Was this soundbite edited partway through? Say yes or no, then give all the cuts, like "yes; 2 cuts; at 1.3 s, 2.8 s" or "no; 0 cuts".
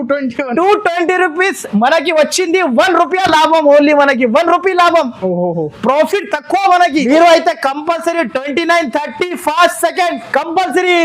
yes; 1 cut; at 7.1 s